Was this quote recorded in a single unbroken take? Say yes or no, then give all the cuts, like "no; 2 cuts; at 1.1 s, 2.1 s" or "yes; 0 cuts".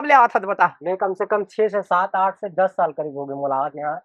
yes; 0 cuts